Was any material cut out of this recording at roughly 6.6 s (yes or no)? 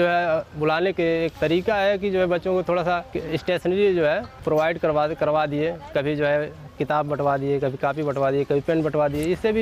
no